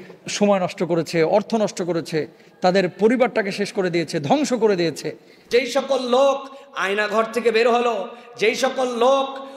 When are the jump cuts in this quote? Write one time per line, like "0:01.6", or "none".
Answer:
0:05.4